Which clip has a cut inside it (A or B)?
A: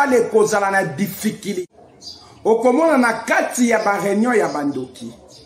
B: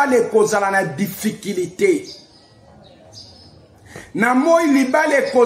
A